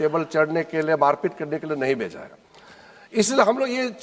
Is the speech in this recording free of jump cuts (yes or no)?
yes